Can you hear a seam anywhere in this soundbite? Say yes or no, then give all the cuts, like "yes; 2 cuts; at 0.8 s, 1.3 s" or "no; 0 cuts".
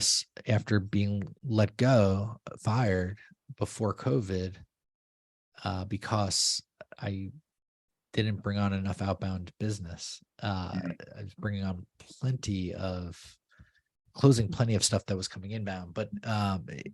yes; 1 cut; at 1.3 s